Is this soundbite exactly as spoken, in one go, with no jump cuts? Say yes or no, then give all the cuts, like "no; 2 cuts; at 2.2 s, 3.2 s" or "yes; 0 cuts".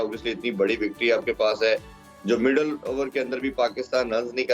yes; 0 cuts